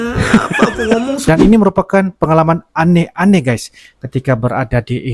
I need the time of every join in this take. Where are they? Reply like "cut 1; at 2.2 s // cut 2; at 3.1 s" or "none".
cut 1; at 1.2 s